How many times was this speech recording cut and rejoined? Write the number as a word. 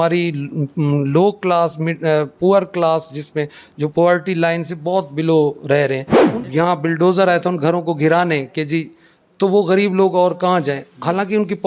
one